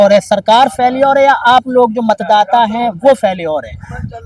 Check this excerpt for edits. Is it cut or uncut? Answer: uncut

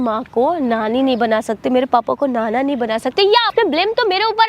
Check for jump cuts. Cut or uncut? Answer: cut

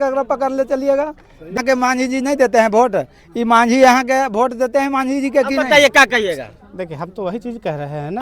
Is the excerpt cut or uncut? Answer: cut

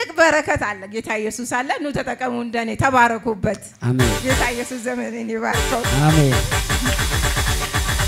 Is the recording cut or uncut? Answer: uncut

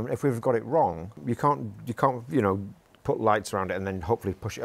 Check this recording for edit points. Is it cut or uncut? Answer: cut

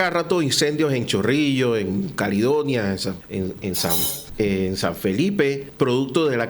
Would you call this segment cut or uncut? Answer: cut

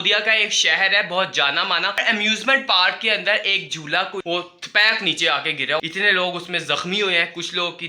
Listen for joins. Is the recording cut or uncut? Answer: cut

